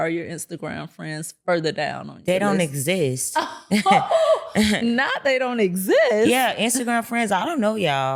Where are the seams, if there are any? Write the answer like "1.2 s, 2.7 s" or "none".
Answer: none